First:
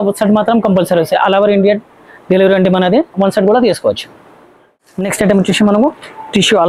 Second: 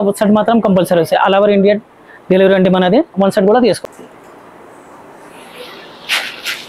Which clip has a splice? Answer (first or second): second